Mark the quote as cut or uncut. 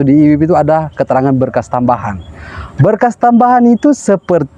uncut